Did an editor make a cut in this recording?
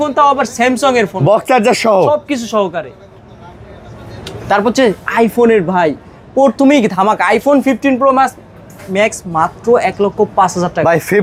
no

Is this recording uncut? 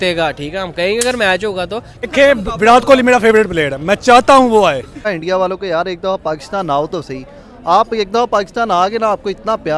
no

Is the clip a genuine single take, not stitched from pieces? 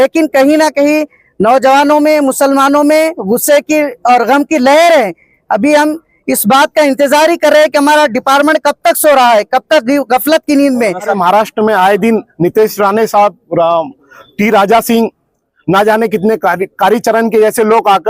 no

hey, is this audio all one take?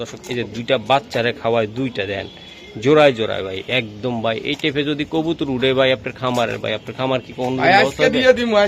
yes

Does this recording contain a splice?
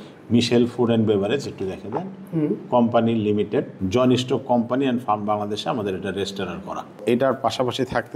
yes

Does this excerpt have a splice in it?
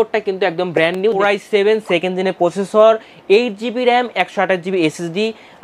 yes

